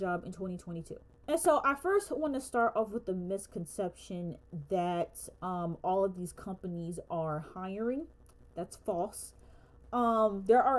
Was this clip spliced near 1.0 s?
no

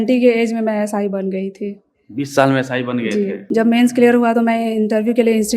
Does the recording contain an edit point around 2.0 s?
no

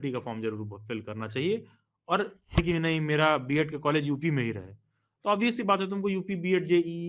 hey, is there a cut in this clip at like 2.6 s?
yes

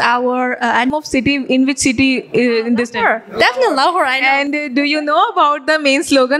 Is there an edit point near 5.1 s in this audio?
no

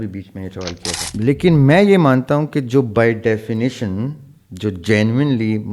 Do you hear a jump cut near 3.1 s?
no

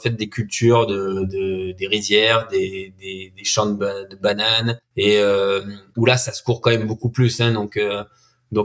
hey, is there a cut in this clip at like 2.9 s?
no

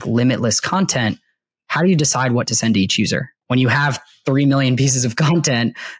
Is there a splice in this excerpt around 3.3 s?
yes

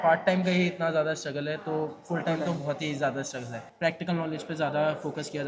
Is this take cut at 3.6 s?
yes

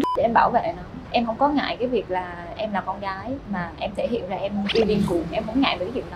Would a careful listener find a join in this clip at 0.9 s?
yes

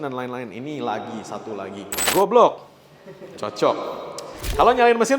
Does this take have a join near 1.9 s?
yes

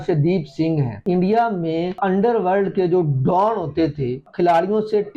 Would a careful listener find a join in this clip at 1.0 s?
yes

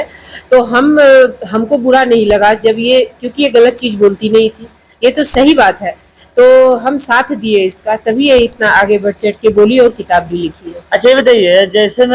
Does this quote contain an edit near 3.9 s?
no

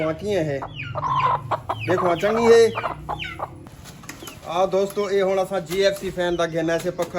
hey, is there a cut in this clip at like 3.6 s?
yes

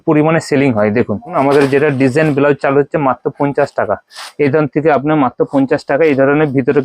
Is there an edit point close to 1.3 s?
yes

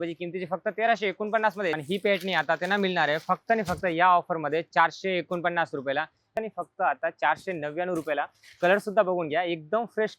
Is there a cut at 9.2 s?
no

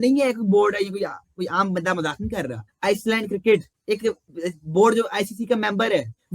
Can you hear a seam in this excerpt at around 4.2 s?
no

